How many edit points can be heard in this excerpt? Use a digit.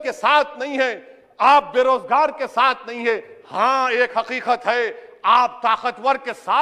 0